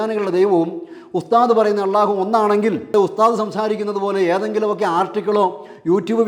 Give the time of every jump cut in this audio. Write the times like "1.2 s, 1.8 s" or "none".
2.9 s